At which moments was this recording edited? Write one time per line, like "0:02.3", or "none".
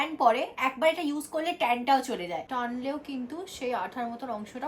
0:02.4